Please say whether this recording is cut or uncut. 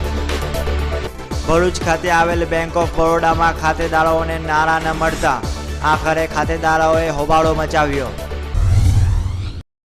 cut